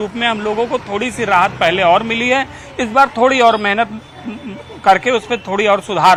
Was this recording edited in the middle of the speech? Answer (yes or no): no